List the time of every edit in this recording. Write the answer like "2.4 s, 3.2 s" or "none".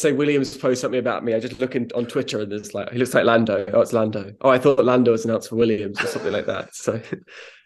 none